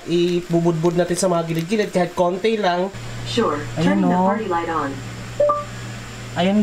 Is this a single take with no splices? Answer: no; 1 cut; at 2.9 s

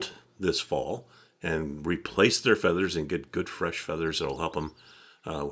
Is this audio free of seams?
yes; 0 cuts

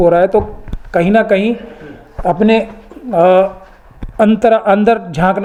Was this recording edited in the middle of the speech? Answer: no; 0 cuts

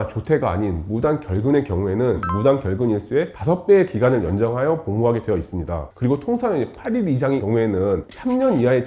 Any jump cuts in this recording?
yes; 4 cuts; at 2.2 s, 3.3 s, 5.8 s, 7.7 s

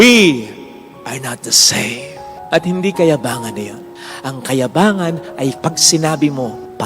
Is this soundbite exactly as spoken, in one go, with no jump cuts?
no; 1 cut; at 3.9 s

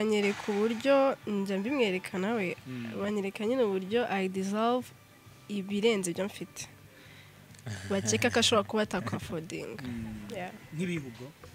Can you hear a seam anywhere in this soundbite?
no; 0 cuts

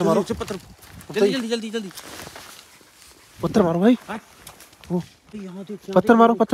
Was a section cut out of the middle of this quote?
yes; 1 cut; at 5.3 s

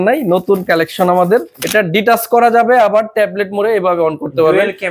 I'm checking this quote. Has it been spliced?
yes; 1 cut; at 1.5 s

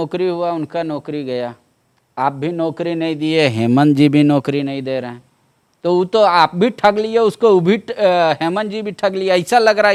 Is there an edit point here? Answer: no; 0 cuts

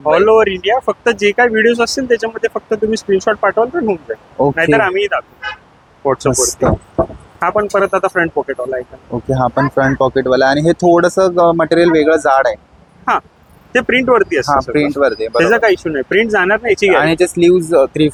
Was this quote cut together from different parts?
no; 0 cuts

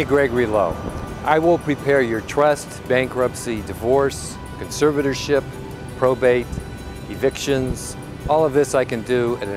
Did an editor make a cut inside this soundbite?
no; 0 cuts

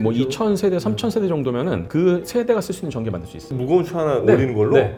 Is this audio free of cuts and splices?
yes; 0 cuts

